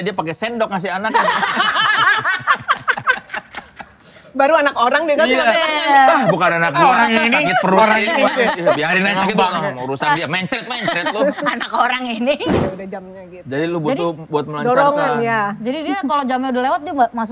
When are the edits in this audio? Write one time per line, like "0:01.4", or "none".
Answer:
0:12.6